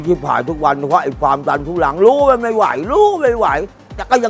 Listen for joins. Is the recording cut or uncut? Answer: uncut